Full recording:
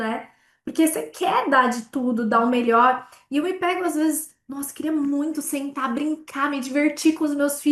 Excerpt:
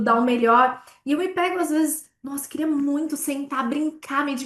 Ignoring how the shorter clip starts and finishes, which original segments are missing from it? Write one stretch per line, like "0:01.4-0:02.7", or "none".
none